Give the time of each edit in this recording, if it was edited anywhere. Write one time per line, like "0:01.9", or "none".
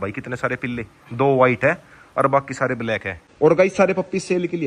none